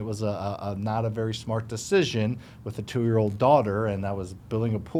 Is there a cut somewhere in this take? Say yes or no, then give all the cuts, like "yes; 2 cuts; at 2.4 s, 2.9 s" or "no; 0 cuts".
no; 0 cuts